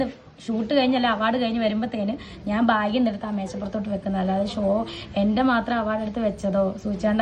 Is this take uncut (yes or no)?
yes